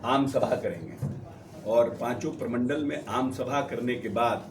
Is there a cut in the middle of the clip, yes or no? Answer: no